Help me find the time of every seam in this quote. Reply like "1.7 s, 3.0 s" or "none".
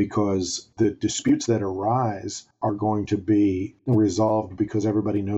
3.7 s